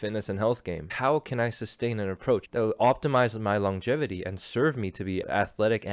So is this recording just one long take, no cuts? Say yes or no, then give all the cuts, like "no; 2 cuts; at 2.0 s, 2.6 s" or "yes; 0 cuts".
no; 3 cuts; at 0.9 s, 2.5 s, 5.2 s